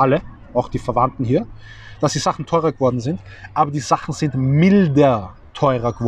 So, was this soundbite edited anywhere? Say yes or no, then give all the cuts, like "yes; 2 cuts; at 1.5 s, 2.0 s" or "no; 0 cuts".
no; 0 cuts